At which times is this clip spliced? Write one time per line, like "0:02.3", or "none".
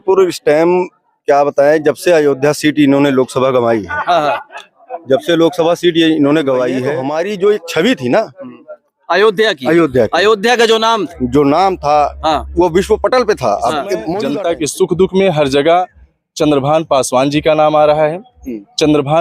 0:07.0
0:14.1